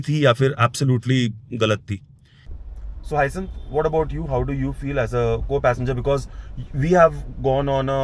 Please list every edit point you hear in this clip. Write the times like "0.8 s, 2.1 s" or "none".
2.5 s